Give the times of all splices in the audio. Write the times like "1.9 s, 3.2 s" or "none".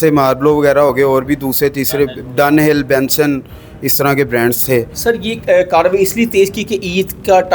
4.9 s